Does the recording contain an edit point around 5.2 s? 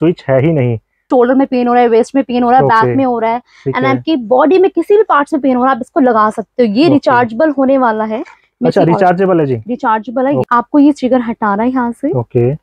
no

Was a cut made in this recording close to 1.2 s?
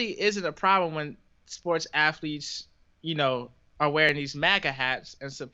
no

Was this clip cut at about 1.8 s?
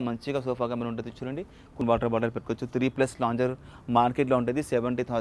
yes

